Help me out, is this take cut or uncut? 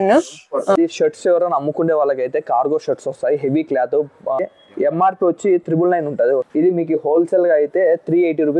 cut